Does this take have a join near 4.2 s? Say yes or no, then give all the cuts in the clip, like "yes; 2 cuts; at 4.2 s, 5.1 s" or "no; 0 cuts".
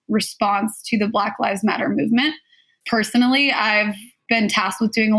yes; 2 cuts; at 2.7 s, 4.2 s